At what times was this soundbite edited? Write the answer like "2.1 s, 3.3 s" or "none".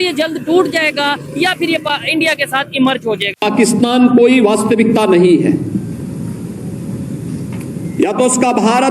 3.4 s